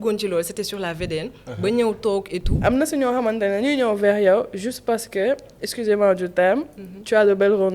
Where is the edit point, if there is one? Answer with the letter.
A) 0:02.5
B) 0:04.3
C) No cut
A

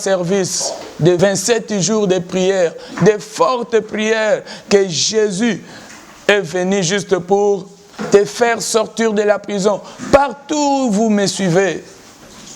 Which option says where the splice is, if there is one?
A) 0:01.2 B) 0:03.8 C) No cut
A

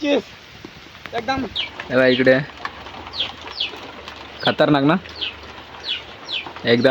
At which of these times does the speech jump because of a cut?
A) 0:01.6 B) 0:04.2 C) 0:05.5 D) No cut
A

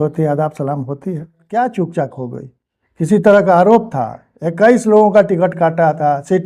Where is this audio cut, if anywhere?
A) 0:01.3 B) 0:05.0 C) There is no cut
A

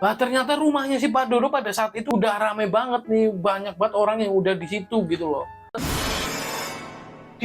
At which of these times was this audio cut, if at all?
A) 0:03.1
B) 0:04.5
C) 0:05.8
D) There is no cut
C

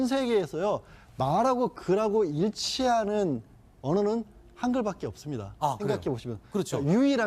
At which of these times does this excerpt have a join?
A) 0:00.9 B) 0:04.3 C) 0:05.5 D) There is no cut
B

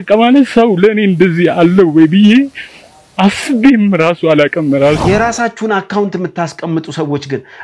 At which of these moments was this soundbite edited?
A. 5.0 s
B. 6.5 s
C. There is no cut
A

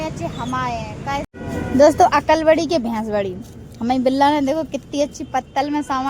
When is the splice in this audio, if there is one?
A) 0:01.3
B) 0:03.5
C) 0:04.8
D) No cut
A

